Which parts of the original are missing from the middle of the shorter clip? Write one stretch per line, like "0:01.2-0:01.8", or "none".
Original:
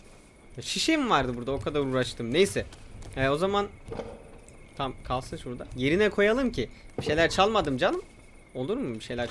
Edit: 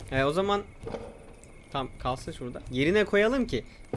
none